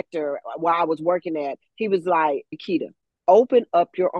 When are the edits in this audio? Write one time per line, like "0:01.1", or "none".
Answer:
0:02.6